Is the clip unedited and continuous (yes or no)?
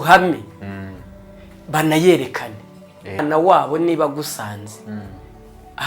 no